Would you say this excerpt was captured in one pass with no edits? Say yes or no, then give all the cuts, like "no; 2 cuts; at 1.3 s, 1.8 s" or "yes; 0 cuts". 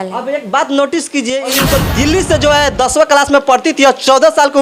no; 1 cut; at 1.6 s